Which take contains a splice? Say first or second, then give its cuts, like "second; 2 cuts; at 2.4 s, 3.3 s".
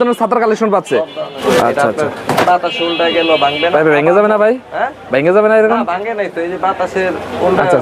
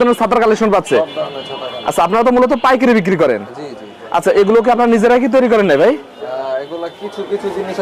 first; 1 cut; at 1.3 s